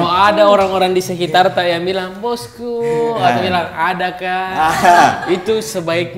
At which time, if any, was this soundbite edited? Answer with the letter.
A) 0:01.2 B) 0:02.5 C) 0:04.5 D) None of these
D